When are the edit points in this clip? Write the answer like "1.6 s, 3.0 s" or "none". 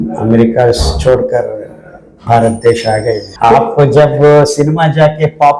3.3 s